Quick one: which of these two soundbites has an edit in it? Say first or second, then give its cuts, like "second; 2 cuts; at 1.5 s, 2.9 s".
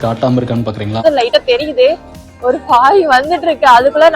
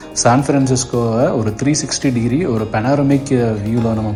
first; 1 cut; at 1.0 s